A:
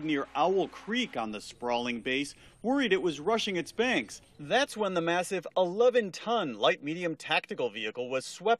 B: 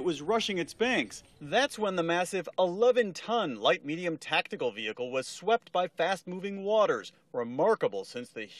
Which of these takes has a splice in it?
A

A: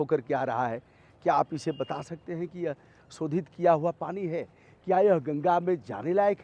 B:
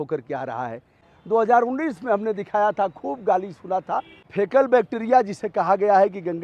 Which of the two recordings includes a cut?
B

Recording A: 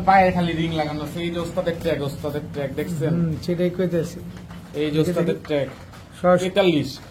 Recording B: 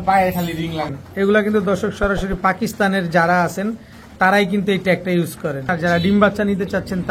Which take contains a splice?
B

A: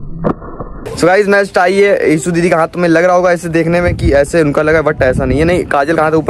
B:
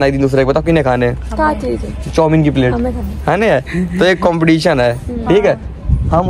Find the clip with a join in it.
A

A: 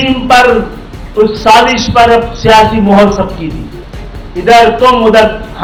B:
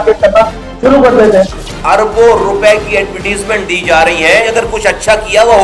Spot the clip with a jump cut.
B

